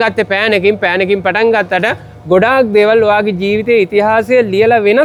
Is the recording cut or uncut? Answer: uncut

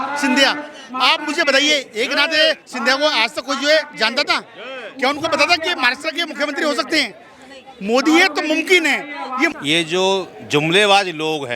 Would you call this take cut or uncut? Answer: cut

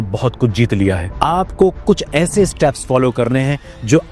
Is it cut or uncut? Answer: cut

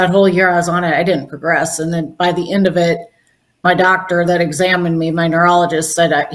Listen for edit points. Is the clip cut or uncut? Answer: uncut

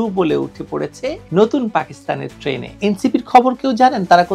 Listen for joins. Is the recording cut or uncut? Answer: cut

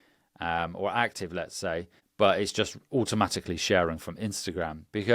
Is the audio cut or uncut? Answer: cut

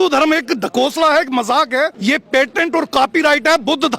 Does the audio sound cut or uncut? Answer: cut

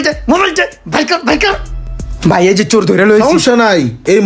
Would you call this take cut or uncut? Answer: uncut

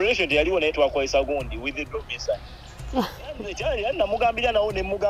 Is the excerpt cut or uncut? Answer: cut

